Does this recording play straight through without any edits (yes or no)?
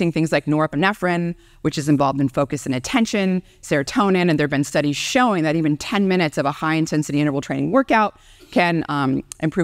yes